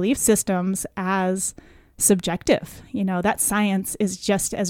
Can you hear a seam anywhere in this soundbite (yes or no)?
no